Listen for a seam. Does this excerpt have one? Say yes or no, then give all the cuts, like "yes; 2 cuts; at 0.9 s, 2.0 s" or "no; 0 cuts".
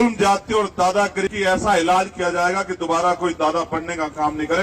yes; 1 cut; at 1.3 s